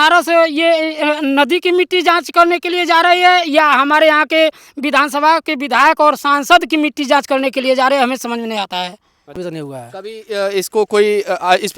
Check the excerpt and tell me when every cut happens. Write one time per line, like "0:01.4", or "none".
0:09.4